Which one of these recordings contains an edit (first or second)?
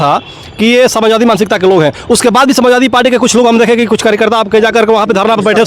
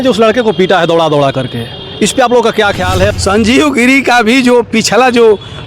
second